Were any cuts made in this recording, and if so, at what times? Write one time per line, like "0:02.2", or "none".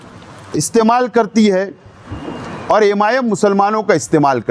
none